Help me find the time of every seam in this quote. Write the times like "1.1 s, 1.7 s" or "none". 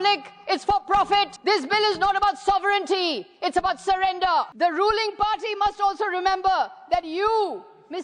1.3 s, 4.5 s